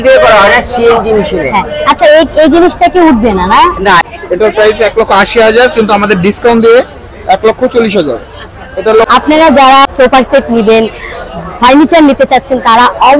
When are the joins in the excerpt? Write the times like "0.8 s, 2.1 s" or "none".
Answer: 4.1 s, 9.1 s, 9.8 s